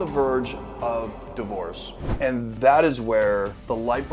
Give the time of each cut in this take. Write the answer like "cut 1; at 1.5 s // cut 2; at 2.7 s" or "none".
cut 1; at 2.1 s